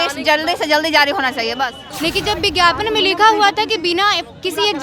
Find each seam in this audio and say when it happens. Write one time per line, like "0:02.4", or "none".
0:01.9